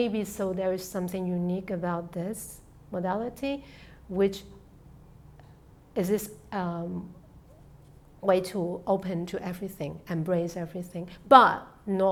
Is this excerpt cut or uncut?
uncut